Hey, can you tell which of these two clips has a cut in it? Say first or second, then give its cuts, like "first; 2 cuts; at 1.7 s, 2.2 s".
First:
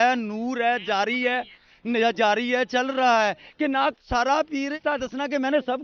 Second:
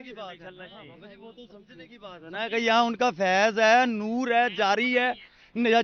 first; 1 cut; at 4.8 s